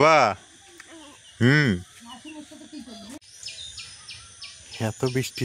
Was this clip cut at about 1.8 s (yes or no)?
no